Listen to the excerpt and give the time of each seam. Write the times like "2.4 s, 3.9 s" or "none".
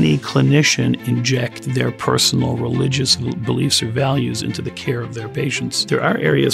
none